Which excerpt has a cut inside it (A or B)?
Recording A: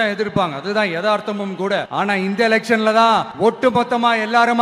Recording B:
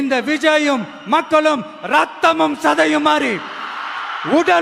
A